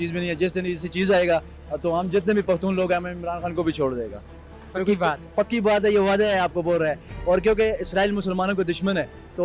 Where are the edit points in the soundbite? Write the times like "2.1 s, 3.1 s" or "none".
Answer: none